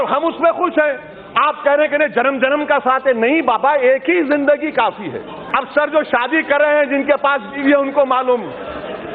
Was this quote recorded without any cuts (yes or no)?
no